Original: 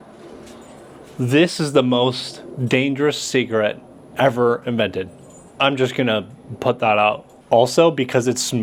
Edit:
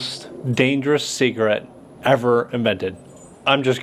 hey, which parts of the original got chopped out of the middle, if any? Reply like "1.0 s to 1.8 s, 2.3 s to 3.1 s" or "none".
none